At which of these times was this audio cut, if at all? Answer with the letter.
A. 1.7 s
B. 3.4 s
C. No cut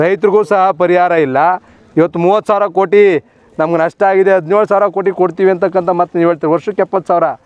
A